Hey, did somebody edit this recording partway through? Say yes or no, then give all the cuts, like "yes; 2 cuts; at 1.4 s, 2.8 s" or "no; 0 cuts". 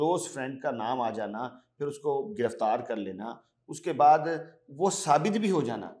no; 0 cuts